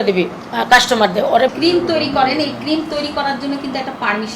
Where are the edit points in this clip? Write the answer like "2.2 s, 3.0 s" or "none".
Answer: 1.5 s